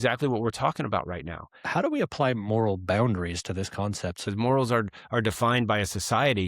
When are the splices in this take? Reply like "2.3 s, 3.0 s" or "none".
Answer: 1.6 s, 4.3 s